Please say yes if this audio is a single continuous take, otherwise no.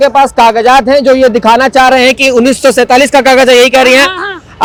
yes